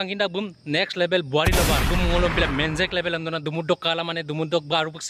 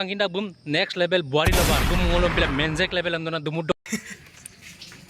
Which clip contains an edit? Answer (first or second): first